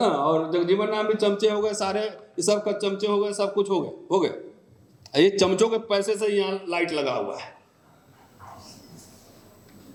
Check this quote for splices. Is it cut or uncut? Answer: uncut